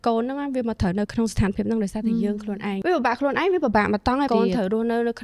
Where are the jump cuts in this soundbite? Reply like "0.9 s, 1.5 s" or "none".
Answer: 2.8 s, 4.3 s